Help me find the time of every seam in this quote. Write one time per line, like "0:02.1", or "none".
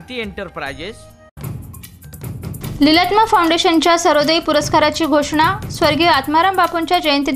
0:01.2